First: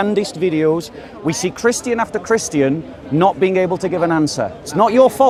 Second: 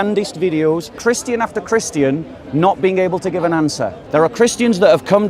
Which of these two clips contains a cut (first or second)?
second